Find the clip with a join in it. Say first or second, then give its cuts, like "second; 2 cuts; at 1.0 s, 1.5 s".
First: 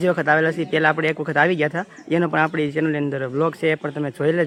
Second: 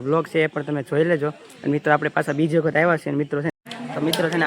second; 1 cut; at 3.5 s